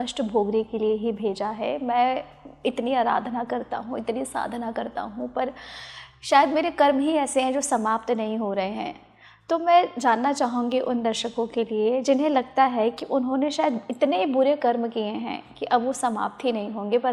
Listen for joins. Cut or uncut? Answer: uncut